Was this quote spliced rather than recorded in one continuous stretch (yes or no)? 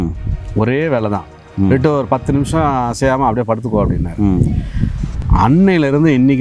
yes